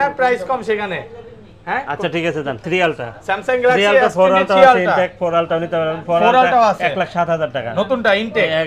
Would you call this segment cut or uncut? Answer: cut